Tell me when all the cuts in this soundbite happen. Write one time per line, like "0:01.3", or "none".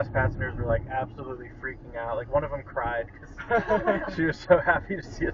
none